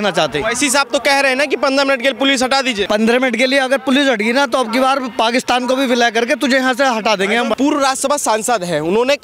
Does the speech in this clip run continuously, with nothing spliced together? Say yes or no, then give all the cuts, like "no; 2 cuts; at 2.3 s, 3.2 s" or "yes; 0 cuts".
no; 2 cuts; at 2.9 s, 7.5 s